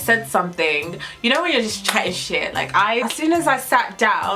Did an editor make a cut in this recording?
yes; 1 cut; at 3.0 s

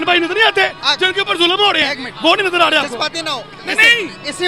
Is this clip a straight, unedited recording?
yes; 0 cuts

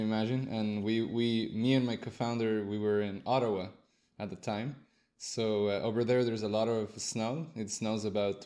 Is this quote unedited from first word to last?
yes; 0 cuts

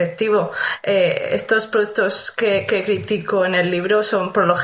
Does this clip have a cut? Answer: no; 0 cuts

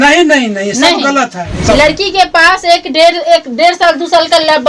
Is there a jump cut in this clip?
yes; 1 cut; at 1.6 s

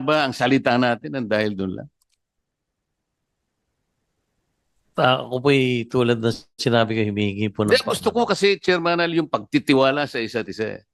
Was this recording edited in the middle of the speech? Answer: no; 0 cuts

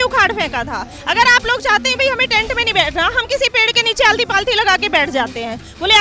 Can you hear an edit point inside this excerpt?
no; 0 cuts

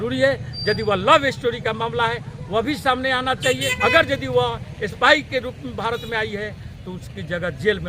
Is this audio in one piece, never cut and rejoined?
no; 1 cut; at 3.7 s

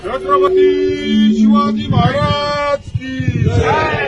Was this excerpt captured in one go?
yes; 0 cuts

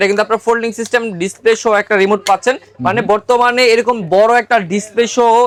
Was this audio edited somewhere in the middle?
no; 0 cuts

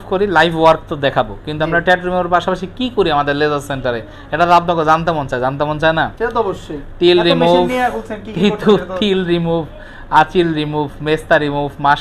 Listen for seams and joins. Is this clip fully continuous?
yes; 0 cuts

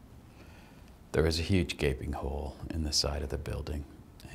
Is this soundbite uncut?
yes; 0 cuts

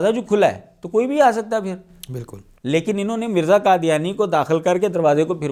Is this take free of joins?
yes; 0 cuts

